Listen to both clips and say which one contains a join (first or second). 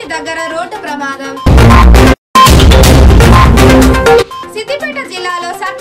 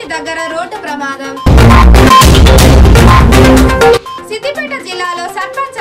first